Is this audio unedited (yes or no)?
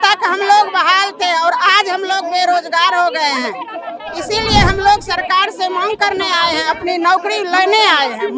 yes